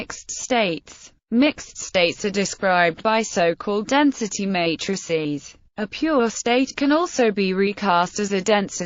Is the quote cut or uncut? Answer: uncut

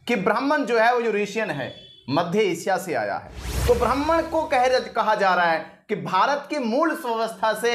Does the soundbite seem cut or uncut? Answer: cut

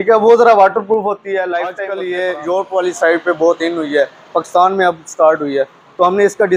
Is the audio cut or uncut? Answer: cut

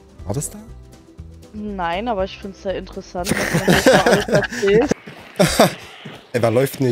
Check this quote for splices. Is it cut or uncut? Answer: cut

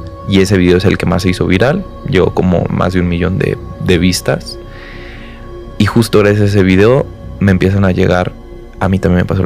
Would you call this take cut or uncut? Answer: uncut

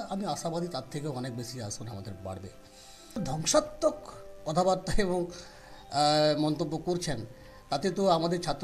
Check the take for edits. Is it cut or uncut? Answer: cut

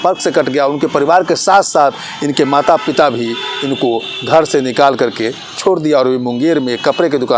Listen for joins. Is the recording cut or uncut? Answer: uncut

